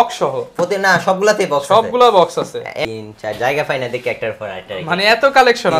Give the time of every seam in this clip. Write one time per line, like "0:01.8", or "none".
0:02.8